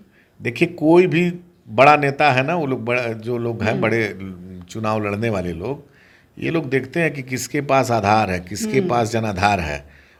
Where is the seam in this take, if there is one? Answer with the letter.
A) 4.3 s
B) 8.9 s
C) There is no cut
C